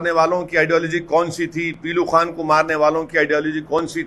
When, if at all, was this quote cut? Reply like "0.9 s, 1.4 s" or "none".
none

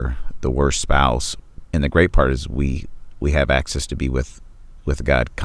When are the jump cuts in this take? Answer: 1.3 s

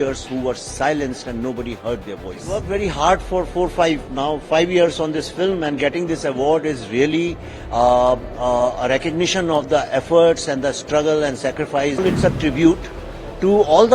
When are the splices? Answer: 2.6 s, 12.0 s

